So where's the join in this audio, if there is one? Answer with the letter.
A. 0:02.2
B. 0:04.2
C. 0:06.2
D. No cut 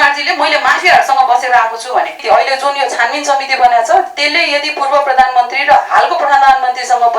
A